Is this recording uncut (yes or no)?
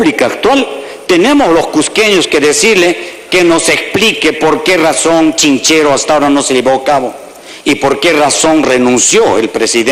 yes